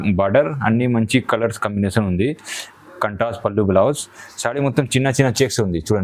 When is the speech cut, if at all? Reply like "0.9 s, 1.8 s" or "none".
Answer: none